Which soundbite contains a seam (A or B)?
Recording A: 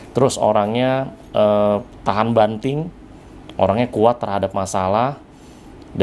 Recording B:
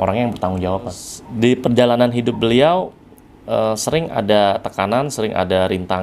B